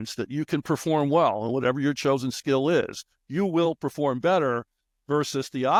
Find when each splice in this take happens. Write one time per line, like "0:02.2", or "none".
none